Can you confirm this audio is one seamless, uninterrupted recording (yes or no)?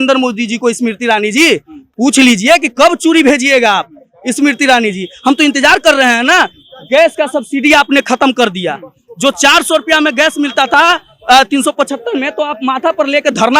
yes